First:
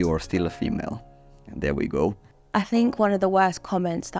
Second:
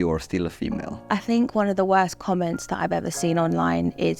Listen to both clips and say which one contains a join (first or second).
second